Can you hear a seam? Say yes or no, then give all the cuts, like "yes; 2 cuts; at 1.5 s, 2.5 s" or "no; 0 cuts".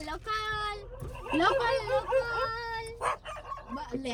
no; 0 cuts